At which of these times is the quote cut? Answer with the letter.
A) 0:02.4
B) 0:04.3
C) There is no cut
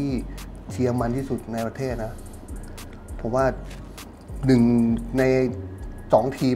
C